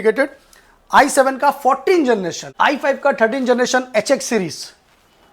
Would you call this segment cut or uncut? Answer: cut